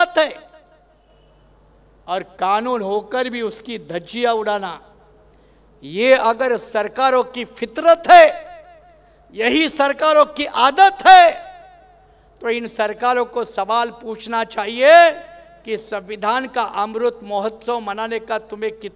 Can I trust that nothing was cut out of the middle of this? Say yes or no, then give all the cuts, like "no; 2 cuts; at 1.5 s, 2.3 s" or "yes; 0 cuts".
yes; 0 cuts